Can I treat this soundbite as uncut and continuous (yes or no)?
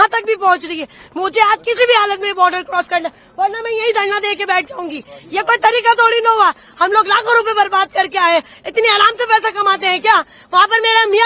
yes